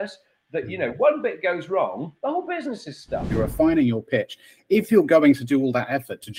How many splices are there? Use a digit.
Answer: 1